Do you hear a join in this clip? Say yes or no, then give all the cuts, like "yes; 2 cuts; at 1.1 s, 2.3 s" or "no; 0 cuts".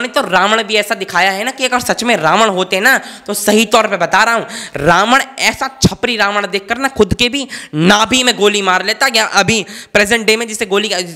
no; 0 cuts